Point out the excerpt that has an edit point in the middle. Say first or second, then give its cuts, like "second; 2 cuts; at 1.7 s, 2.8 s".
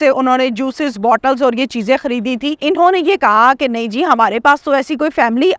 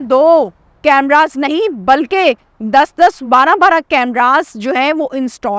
first; 1 cut; at 2.6 s